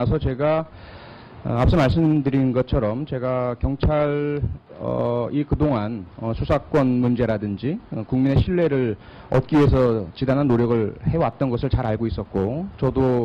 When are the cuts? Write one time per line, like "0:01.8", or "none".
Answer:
0:04.9